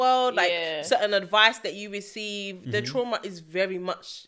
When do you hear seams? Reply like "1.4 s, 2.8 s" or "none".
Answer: none